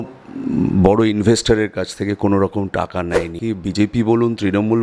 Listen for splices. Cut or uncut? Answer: cut